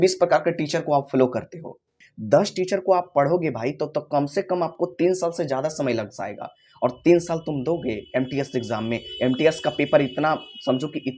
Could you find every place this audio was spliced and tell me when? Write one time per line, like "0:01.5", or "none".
0:01.9